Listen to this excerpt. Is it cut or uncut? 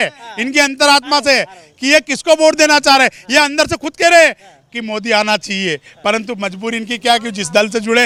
uncut